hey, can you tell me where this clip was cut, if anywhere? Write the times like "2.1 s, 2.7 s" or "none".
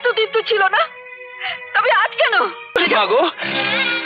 2.8 s